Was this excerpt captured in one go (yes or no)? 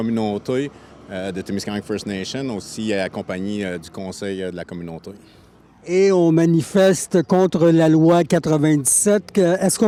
yes